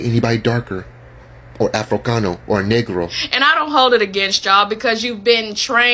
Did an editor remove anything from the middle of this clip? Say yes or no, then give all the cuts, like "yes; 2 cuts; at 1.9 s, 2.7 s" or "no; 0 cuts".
yes; 1 cut; at 3.2 s